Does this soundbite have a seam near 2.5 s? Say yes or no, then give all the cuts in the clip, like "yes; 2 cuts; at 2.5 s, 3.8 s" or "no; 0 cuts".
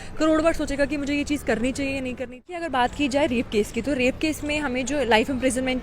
yes; 1 cut; at 2.5 s